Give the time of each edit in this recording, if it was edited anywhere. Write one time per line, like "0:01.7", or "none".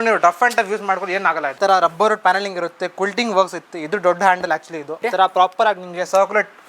0:01.5
0:05.0